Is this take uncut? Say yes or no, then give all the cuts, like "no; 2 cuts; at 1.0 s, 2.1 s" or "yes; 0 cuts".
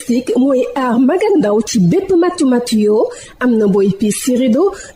yes; 0 cuts